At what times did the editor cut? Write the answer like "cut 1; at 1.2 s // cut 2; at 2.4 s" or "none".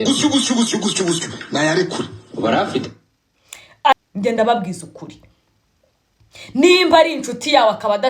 cut 1; at 3.9 s